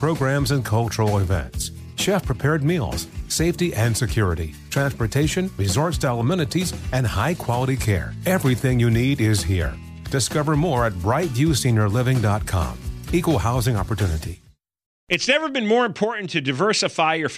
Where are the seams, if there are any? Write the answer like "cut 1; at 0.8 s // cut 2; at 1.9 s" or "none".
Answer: cut 1; at 14.9 s